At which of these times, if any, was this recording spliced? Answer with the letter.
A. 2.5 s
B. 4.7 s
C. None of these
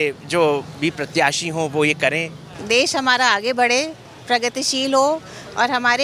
A